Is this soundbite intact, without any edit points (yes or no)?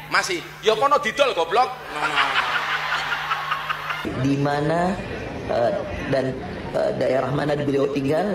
no